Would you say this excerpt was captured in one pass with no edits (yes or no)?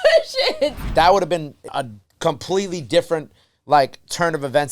no